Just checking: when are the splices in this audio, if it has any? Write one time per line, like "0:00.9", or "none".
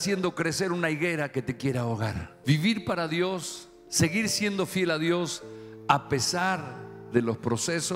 0:02.3